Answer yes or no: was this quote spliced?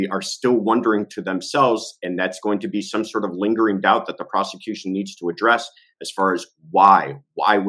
no